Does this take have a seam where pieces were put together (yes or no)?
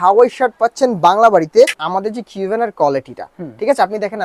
yes